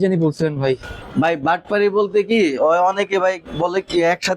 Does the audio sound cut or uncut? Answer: cut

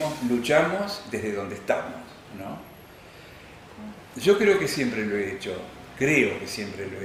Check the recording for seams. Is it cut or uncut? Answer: uncut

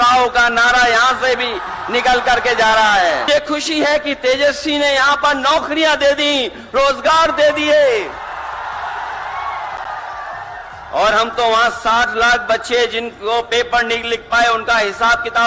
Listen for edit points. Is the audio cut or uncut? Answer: cut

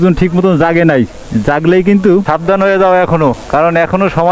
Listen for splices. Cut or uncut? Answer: cut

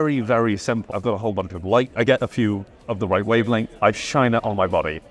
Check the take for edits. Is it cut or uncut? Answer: cut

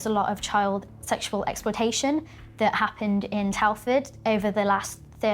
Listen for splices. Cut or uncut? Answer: uncut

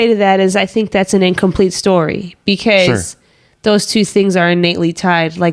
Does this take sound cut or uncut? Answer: uncut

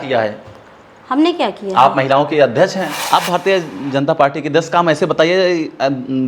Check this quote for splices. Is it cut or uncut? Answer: cut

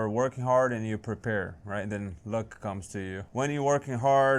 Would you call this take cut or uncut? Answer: cut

